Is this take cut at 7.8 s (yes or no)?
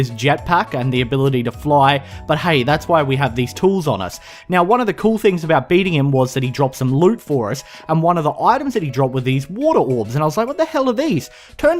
yes